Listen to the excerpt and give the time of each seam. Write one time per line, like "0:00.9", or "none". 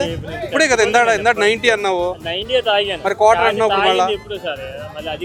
none